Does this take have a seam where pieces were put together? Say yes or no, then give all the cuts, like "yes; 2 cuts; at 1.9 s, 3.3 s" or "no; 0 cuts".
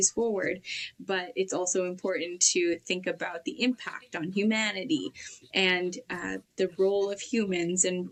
no; 0 cuts